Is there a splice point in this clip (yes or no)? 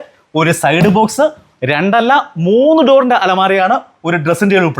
no